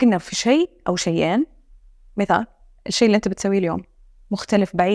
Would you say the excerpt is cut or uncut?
uncut